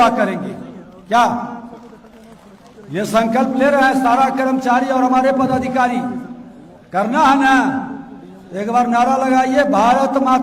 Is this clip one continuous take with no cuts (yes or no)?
yes